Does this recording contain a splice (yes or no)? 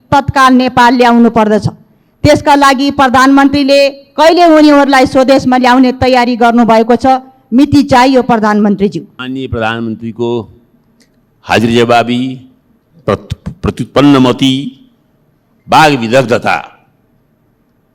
yes